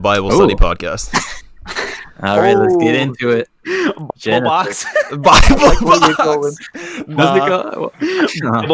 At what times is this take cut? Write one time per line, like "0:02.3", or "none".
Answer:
none